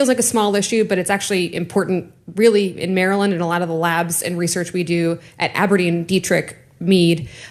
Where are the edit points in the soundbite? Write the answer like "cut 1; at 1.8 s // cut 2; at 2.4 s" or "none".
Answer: none